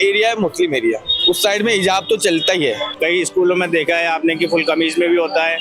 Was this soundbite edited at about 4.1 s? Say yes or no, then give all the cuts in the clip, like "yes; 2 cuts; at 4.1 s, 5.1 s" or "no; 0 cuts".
no; 1 cut; at 2.9 s